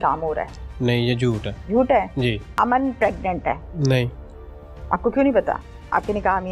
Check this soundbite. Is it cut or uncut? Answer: cut